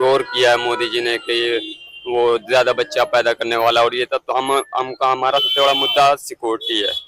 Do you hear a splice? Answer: no; 0 cuts

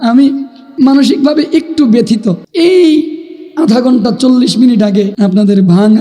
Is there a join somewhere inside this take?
yes; 3 cuts; at 0.7 s, 2.4 s, 5.1 s

